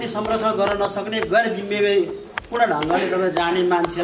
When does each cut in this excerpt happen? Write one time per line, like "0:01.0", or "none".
none